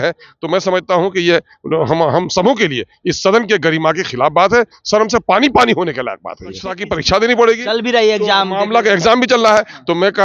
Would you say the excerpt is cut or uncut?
cut